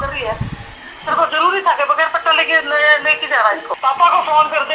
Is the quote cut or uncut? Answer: cut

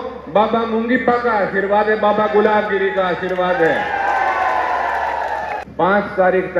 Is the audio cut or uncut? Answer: cut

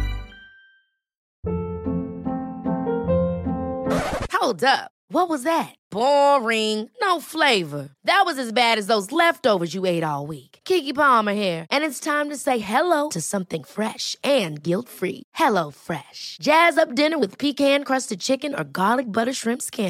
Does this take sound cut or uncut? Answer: cut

